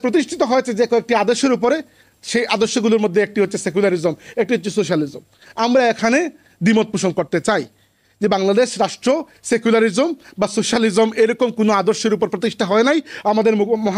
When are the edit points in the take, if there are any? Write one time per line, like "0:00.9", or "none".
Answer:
none